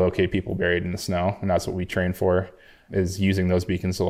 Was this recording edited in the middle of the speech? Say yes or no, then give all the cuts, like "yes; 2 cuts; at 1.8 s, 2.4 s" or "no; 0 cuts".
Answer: yes; 1 cut; at 2.9 s